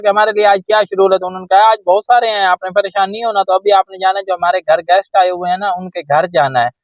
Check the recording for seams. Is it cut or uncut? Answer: uncut